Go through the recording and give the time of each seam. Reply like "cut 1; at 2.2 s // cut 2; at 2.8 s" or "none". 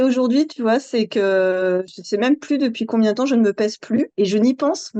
cut 1; at 1.9 s